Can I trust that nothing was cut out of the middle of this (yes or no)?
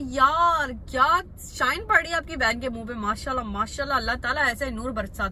yes